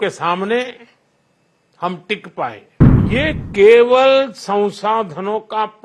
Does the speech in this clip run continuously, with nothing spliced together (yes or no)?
no